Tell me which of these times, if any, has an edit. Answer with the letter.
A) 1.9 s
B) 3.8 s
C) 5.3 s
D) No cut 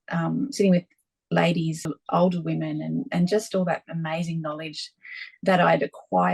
A